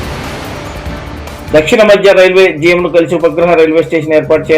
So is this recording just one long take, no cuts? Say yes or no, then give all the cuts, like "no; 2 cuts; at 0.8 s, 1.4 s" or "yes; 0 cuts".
no; 1 cut; at 1.4 s